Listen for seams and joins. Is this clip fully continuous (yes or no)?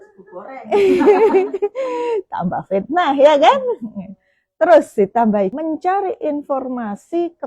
no